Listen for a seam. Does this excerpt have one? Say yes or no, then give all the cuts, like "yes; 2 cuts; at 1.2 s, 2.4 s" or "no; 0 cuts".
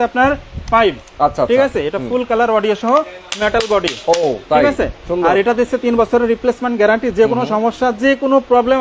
no; 0 cuts